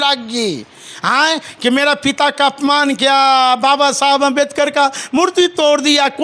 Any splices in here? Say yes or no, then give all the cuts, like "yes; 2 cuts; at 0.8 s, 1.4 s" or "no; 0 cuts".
no; 0 cuts